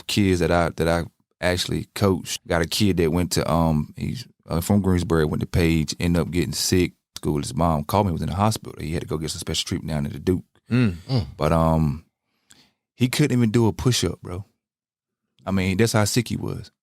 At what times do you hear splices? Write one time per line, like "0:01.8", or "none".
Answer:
0:02.3
0:07.2